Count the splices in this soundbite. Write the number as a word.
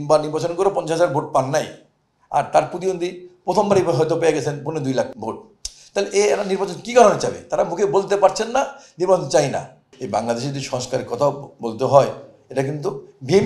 two